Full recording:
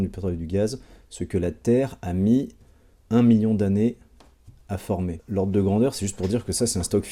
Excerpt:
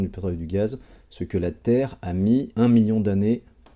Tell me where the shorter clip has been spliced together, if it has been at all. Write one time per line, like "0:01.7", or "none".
0:02.5